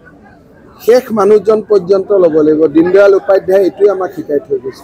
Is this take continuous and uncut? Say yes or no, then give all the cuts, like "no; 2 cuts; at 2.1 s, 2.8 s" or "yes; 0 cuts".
yes; 0 cuts